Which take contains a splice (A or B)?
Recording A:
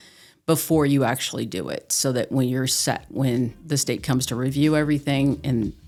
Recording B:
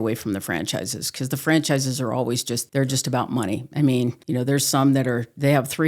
B